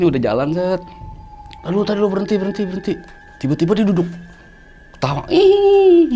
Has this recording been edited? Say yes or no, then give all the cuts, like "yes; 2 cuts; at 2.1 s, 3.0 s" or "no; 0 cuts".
no; 0 cuts